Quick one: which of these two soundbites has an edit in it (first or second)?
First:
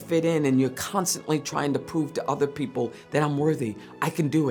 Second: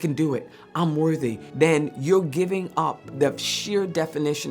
second